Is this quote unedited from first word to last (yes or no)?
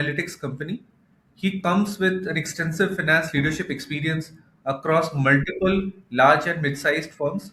yes